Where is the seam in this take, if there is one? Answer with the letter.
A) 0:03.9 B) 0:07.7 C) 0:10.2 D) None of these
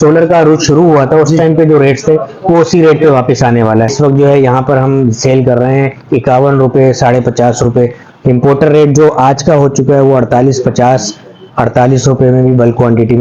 A